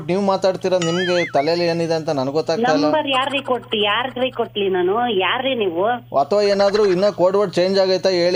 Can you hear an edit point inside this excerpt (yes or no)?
no